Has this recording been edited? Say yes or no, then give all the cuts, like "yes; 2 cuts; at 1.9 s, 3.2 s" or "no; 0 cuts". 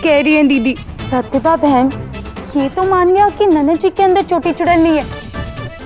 yes; 1 cut; at 0.9 s